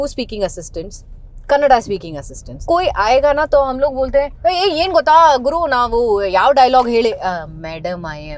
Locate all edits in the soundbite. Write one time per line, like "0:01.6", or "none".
0:02.6
0:04.3